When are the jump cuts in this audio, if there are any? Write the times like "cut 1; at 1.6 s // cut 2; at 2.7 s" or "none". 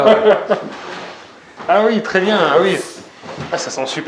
none